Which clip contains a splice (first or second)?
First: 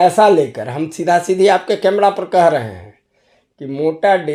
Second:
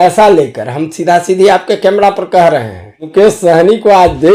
second